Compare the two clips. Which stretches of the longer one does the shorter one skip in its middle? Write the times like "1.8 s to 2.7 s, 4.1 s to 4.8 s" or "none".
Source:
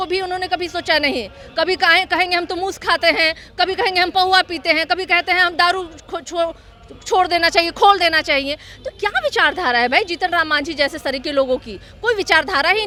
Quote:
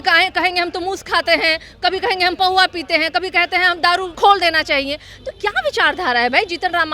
5.9 s to 7.7 s